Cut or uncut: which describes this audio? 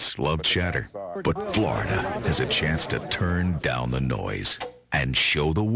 cut